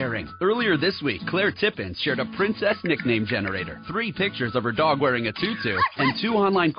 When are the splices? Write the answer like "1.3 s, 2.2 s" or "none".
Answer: none